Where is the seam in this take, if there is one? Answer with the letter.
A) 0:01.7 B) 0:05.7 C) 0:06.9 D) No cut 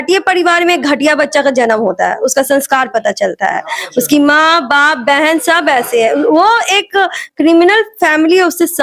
D